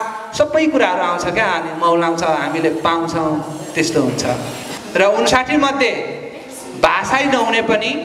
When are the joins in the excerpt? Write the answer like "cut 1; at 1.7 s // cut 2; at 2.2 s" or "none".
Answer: cut 1; at 4.6 s